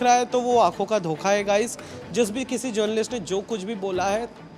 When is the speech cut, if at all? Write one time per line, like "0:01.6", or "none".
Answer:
none

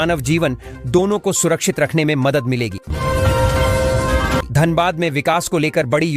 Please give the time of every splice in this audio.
0:02.8
0:04.4

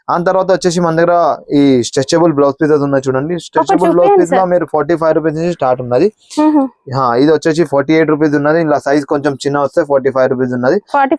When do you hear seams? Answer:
none

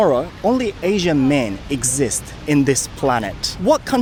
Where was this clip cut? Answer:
none

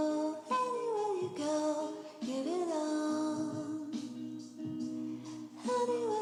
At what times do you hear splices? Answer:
none

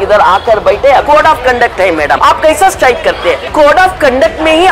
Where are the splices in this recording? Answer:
0:01.0
0:02.2
0:03.4

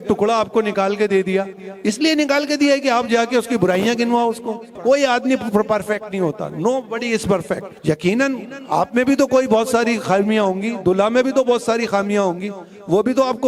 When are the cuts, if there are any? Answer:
none

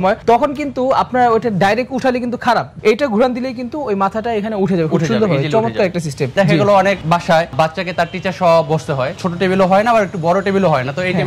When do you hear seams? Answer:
0:02.8
0:06.3
0:09.2

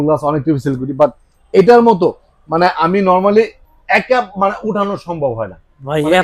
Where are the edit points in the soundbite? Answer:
none

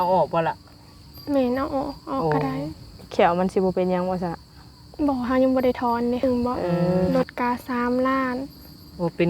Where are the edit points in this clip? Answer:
0:07.1

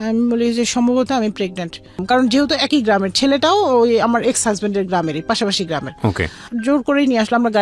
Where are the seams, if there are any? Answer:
0:02.0

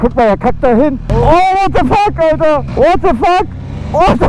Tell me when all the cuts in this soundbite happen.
0:01.0
0:02.7

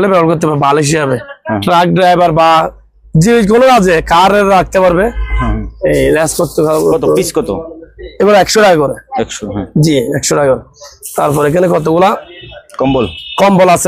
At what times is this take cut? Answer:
none

